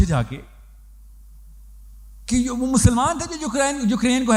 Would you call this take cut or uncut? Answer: uncut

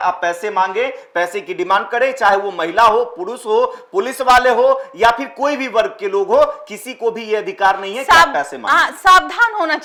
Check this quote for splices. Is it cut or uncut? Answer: uncut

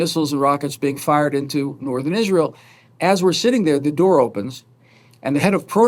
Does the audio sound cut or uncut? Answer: uncut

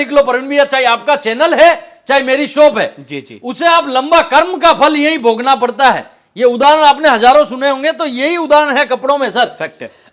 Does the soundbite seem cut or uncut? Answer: uncut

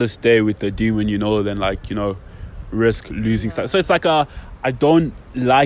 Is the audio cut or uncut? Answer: uncut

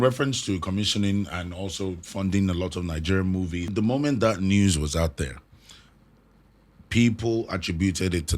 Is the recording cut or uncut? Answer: cut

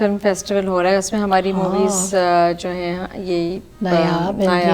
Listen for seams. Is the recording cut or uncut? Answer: uncut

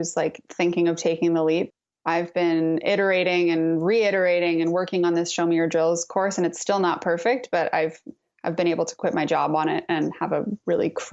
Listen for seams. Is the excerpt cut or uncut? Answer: cut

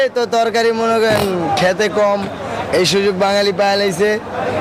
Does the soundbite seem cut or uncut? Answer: uncut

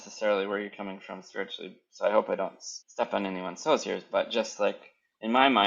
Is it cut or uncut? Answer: uncut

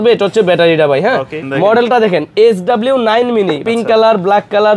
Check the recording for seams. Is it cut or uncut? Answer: cut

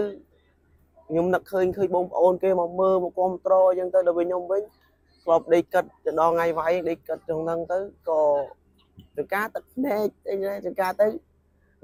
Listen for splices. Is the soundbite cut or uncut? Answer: uncut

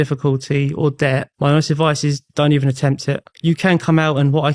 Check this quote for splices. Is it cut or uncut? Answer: cut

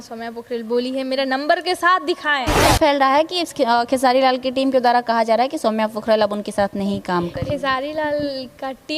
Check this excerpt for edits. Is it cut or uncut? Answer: cut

